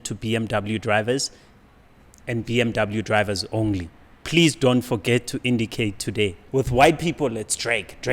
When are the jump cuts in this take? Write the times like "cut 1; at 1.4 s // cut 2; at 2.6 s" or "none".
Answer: cut 1; at 6.4 s